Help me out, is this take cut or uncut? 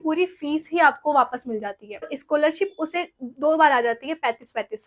cut